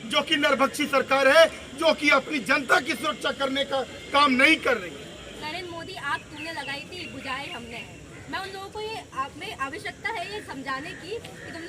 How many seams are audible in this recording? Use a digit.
1